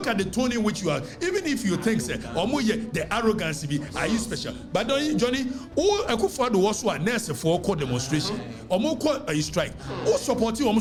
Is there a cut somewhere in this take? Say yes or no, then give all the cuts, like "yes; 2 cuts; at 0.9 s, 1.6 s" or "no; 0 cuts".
no; 0 cuts